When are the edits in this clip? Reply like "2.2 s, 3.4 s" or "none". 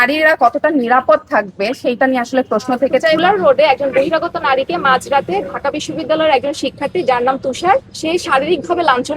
3.2 s